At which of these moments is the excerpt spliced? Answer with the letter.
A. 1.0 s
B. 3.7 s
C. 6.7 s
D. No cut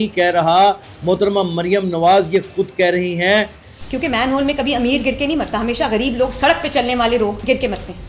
B